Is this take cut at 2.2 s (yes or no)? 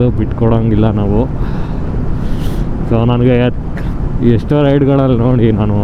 no